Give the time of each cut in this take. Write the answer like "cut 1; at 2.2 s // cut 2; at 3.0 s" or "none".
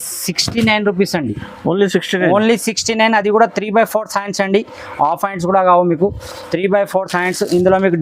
none